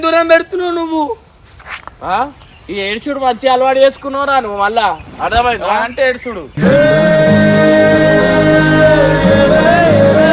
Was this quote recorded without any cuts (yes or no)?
yes